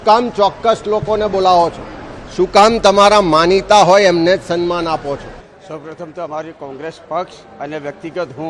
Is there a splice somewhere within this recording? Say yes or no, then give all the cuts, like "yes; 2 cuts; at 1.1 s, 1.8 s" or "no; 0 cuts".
yes; 1 cut; at 6.8 s